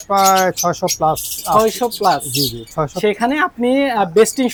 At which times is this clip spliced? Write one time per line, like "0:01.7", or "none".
none